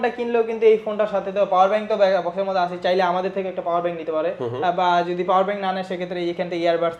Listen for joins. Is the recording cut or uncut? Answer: uncut